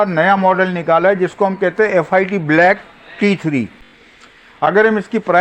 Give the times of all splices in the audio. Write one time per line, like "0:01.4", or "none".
none